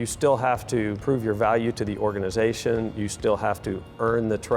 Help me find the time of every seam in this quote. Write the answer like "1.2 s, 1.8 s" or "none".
1.0 s